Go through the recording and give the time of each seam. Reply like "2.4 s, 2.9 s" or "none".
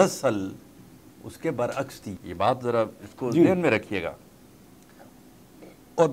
2.1 s